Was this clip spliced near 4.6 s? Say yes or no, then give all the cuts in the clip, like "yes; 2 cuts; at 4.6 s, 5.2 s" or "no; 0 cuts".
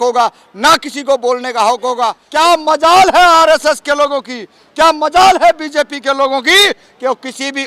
no; 1 cut; at 2.2 s